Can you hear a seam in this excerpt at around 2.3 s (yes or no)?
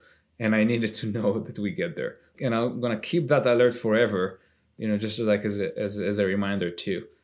yes